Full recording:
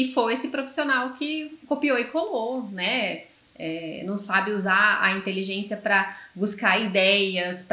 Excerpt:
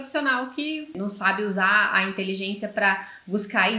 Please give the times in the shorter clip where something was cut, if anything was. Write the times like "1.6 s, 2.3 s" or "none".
0.9 s